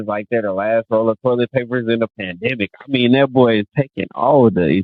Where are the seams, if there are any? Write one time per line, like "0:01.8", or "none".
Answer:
none